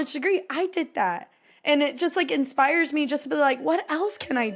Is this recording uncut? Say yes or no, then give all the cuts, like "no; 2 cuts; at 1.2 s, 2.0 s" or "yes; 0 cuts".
yes; 0 cuts